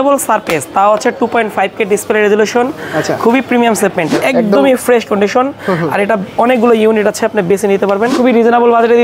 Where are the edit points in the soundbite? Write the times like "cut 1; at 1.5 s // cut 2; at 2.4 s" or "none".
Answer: cut 1; at 4.1 s // cut 2; at 8.1 s